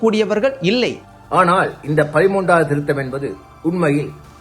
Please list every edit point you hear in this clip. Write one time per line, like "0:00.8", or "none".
0:01.1